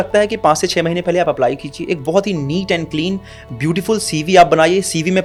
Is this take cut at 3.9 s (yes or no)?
no